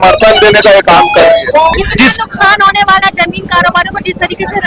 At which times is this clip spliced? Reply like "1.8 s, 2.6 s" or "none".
1.8 s